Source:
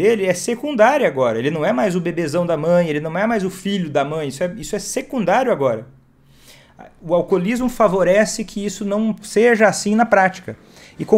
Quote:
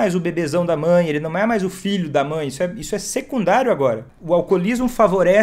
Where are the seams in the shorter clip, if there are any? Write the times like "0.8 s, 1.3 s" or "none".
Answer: 4.1 s